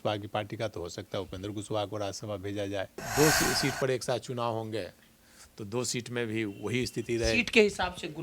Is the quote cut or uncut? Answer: cut